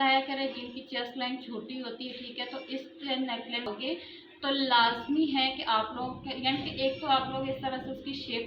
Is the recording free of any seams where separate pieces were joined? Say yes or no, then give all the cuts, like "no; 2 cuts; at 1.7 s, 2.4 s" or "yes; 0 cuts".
no; 1 cut; at 3.7 s